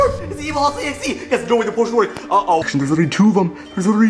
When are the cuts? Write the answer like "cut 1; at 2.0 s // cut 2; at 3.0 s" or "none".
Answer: cut 1; at 2.7 s